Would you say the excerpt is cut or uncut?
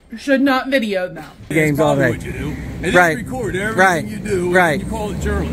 cut